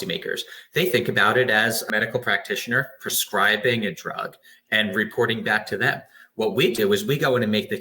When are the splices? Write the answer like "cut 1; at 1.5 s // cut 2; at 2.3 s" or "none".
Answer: cut 1; at 1.9 s